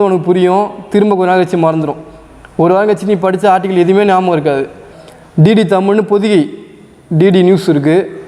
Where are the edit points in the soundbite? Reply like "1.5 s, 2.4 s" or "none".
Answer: 5.1 s